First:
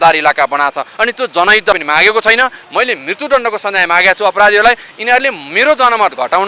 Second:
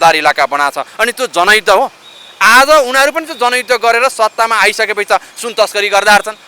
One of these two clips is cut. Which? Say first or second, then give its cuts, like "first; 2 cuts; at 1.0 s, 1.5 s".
first; 1 cut; at 1.7 s